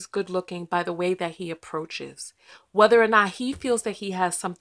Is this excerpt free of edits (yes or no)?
yes